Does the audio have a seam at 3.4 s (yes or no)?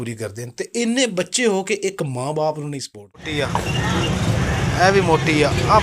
yes